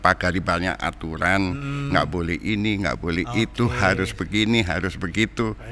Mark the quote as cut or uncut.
uncut